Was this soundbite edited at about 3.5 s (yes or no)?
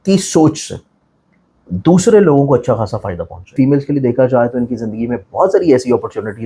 yes